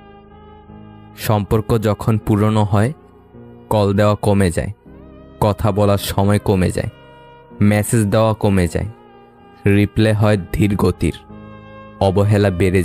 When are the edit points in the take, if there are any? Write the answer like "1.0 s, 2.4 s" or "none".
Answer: 1.2 s

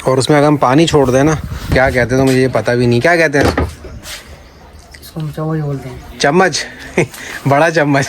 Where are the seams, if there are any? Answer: 1.7 s

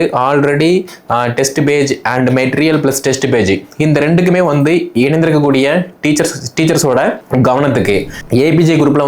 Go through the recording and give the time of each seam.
7.2 s, 8.2 s

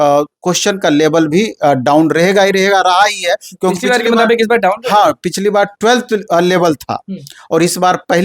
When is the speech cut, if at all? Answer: none

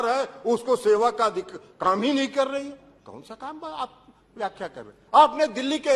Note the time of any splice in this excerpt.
none

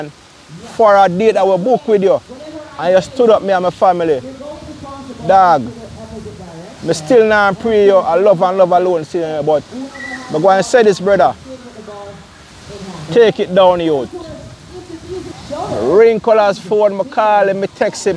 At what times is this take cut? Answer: 15.4 s

